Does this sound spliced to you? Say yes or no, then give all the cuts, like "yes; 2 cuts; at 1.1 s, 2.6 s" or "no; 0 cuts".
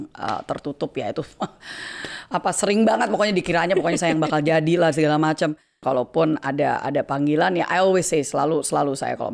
yes; 1 cut; at 5.8 s